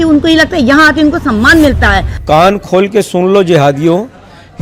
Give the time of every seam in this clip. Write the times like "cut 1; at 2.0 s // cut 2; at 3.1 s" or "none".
cut 1; at 2.1 s